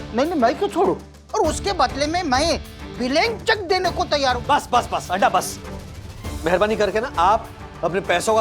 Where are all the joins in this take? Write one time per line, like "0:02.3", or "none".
0:01.1
0:04.4